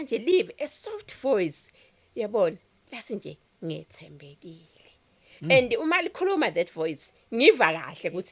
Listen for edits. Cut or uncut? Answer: uncut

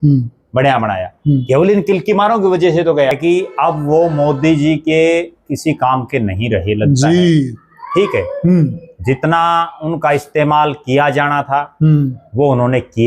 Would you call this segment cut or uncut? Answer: cut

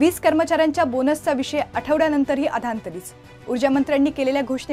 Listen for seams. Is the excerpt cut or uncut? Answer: uncut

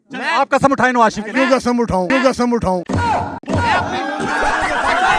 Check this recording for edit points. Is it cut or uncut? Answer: cut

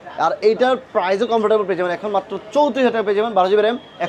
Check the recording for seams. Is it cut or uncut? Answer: uncut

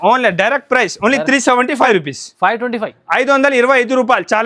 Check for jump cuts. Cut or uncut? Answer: cut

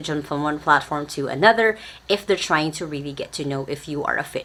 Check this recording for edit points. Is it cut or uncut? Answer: uncut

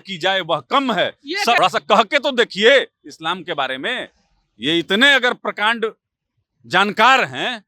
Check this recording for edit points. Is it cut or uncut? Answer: cut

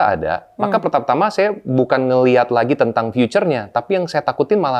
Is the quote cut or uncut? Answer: uncut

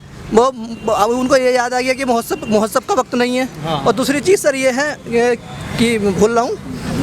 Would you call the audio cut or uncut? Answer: uncut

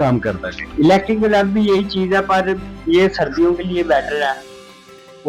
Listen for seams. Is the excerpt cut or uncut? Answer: uncut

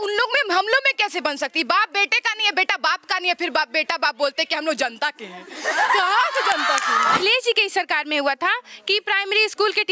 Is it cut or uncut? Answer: cut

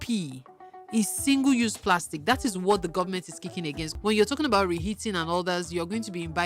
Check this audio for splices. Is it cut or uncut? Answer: cut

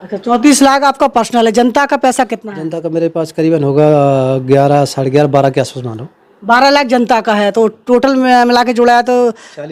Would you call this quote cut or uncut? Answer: uncut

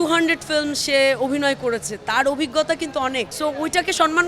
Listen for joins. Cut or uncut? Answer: cut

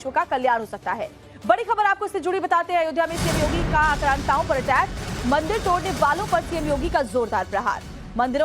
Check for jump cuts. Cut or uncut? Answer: cut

